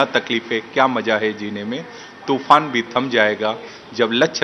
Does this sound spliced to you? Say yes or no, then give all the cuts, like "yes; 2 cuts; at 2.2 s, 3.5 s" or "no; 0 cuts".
no; 0 cuts